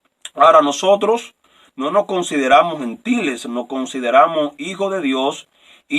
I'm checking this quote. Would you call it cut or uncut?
uncut